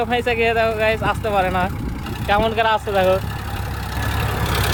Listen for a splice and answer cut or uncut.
uncut